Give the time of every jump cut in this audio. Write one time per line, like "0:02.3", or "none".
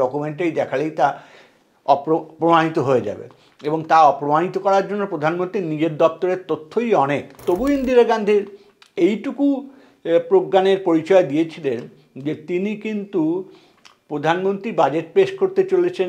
0:07.4